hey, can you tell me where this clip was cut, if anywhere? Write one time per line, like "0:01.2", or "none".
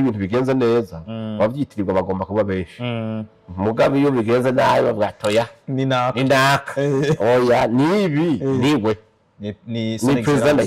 none